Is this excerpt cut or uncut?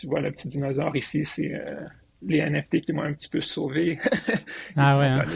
uncut